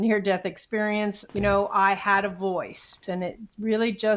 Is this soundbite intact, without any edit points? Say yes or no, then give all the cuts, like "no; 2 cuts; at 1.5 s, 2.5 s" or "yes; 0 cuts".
no; 2 cuts; at 1.2 s, 3.0 s